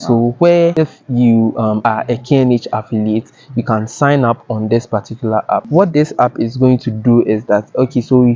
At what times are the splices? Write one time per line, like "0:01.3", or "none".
0:00.7
0:01.8
0:05.7

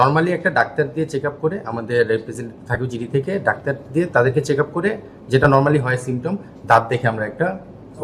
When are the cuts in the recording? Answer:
none

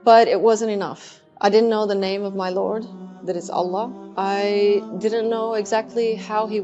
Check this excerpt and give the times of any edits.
none

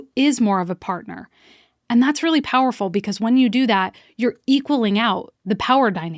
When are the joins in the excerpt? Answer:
none

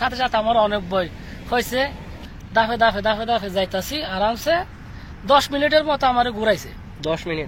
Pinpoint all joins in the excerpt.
0:02.1

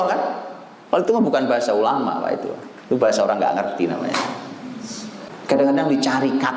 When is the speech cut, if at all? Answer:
0:05.2

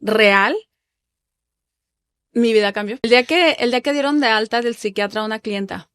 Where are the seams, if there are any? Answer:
0:03.1

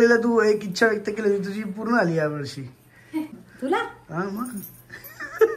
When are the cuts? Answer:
0:03.3

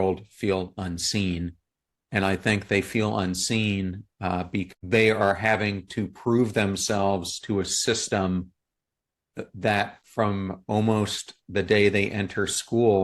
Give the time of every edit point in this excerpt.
0:04.7
0:10.0

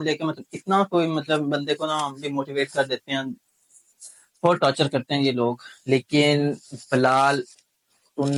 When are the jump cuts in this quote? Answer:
none

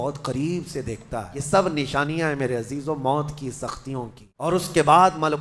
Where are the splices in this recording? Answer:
0:01.3
0:04.5

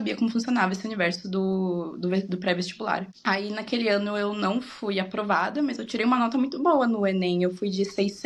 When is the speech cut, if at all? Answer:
none

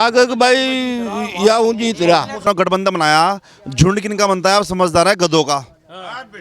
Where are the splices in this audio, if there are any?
0:02.4

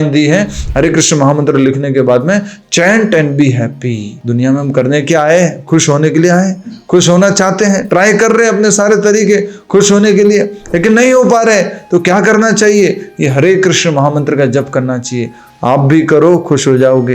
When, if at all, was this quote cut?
0:04.1

